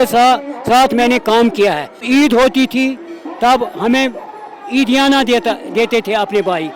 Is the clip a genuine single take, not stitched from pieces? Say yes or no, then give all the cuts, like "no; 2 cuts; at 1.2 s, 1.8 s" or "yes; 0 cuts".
no; 1 cut; at 2.0 s